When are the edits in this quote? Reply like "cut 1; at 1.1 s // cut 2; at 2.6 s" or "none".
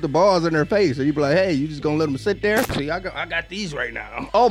cut 1; at 2.7 s